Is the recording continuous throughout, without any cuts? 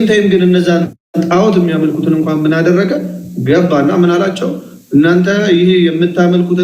yes; 0 cuts

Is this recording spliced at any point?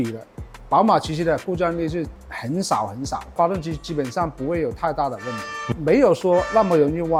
no; 0 cuts

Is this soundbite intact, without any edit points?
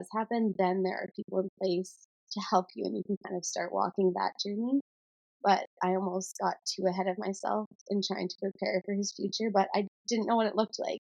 no; 1 cut; at 10.0 s

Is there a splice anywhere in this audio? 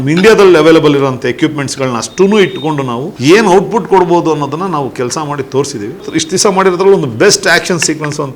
yes; 2 cuts; at 3.0 s, 6.0 s

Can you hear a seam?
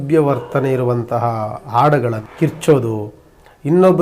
yes; 1 cut; at 2.2 s

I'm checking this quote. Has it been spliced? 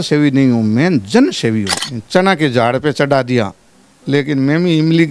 yes; 1 cut; at 1.8 s

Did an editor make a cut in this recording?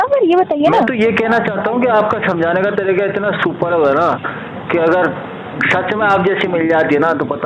no; 0 cuts

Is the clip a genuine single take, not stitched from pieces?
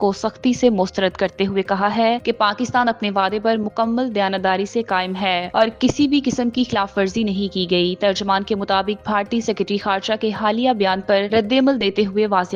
yes; 0 cuts

